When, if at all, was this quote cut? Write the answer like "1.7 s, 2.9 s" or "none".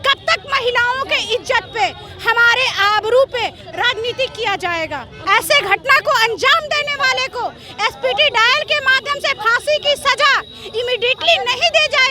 5.1 s